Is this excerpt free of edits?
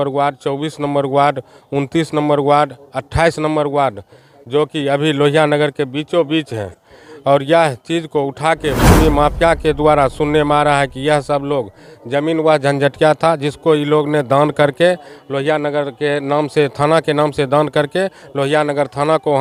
yes; 0 cuts

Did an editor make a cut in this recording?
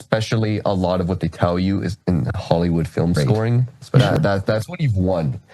yes; 1 cut; at 4.0 s

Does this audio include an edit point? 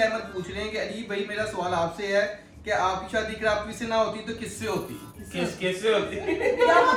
no; 0 cuts

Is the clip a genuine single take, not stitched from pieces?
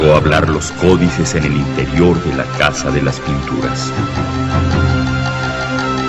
no; 1 cut; at 2.2 s

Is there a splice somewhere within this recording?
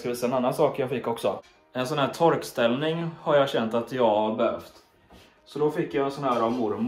no; 0 cuts

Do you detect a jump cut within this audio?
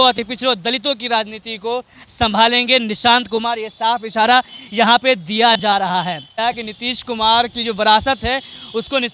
yes; 1 cut; at 6.4 s

